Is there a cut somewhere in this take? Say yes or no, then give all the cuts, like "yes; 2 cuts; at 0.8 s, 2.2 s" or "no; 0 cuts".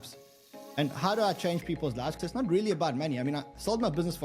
yes; 1 cut; at 2.1 s